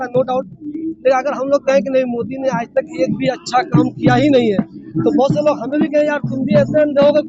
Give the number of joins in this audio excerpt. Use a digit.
0